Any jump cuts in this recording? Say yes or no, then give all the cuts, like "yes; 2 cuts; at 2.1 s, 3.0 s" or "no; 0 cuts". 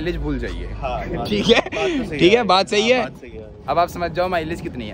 no; 0 cuts